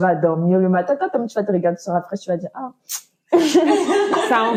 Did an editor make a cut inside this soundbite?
no; 0 cuts

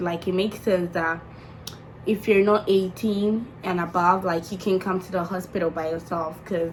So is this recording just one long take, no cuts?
yes; 0 cuts

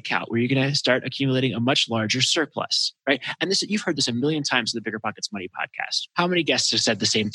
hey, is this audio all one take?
no; 1 cut; at 6.0 s

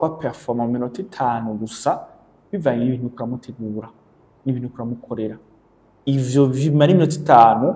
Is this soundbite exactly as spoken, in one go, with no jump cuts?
yes; 0 cuts

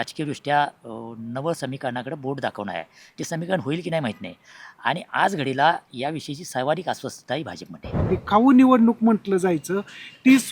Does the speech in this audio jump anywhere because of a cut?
yes; 1 cut; at 8.0 s

